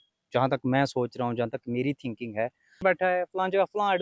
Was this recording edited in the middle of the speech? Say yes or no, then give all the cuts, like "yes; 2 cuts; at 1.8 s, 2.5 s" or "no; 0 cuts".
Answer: yes; 1 cut; at 2.8 s